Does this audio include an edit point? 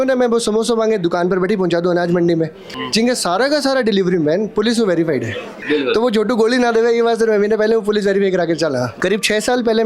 yes; 3 cuts; at 2.8 s, 5.6 s, 8.9 s

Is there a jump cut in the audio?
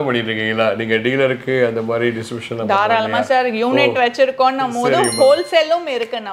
no; 0 cuts

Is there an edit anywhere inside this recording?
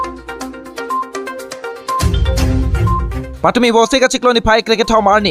no; 0 cuts

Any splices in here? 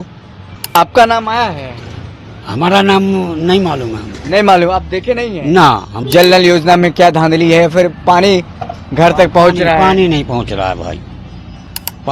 yes; 1 cut; at 5.9 s

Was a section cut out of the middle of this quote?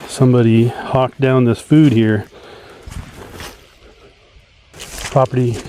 yes; 1 cut; at 4.7 s

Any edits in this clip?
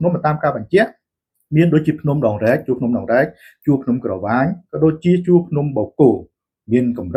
no; 0 cuts

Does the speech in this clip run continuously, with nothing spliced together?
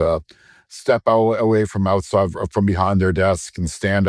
yes; 0 cuts

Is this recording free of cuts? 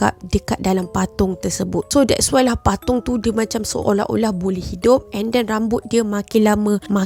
yes; 0 cuts

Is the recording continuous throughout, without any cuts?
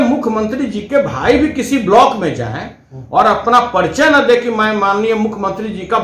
yes; 0 cuts

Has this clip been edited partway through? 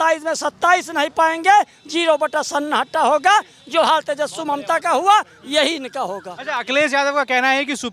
no; 0 cuts

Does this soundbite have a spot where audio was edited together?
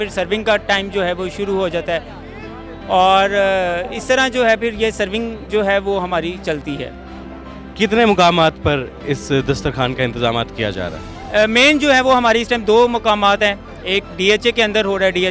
no; 0 cuts

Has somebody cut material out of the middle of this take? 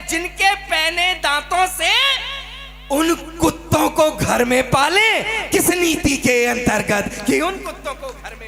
no; 0 cuts

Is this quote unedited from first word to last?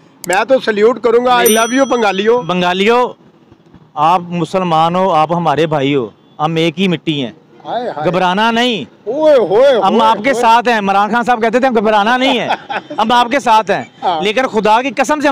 yes; 0 cuts

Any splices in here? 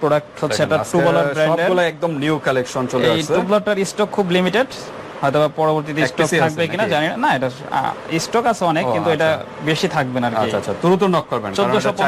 no; 0 cuts

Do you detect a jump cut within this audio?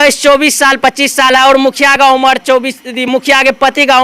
no; 0 cuts

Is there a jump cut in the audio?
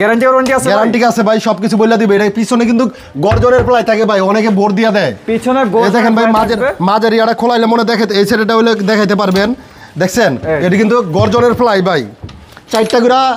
no; 0 cuts

